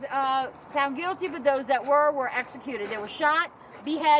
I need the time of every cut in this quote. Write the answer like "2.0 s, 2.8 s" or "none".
none